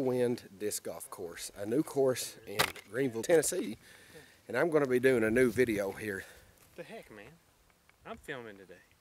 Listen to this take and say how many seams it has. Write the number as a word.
one